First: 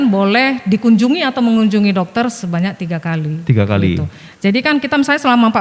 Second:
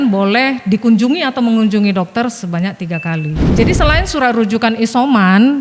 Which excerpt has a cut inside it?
second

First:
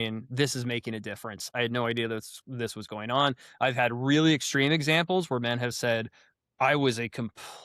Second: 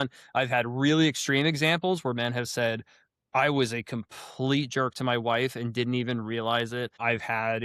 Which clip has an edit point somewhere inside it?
first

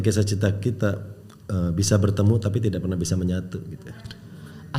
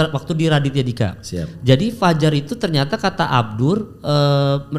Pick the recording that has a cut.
second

